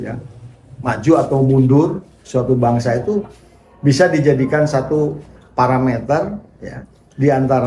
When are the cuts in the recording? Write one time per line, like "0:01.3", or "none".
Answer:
none